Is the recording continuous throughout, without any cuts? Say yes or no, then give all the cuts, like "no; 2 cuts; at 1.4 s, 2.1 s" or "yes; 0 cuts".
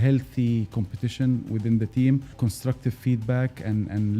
no; 1 cut; at 2.3 s